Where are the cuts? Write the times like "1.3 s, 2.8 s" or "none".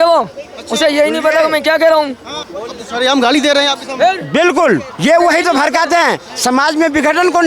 4.9 s